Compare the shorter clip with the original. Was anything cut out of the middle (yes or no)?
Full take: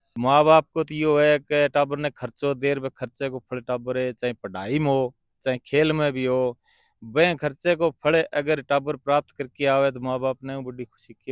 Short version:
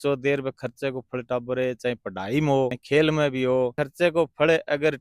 yes